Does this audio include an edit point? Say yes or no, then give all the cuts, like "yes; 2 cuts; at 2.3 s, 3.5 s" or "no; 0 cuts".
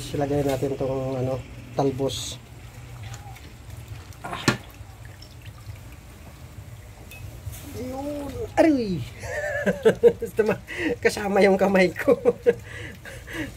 no; 0 cuts